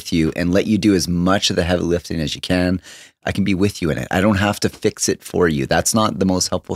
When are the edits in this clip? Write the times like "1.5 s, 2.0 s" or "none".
3.0 s